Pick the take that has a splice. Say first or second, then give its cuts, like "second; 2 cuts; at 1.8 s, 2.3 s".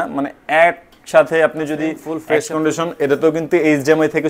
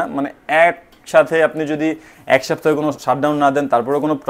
first; 1 cut; at 2.1 s